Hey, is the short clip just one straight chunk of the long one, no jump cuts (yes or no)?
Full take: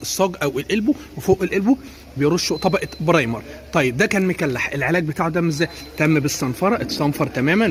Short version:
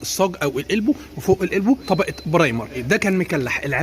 no